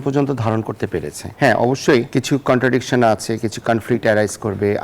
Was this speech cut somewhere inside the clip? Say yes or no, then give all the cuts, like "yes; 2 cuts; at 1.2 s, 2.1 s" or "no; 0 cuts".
yes; 2 cuts; at 1.2 s, 2.1 s